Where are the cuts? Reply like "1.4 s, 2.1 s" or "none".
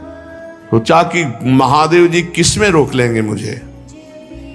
none